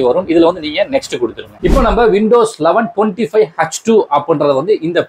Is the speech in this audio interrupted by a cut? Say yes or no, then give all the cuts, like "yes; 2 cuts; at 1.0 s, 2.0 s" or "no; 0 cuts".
yes; 1 cut; at 1.4 s